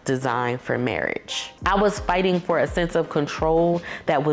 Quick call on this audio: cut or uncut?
cut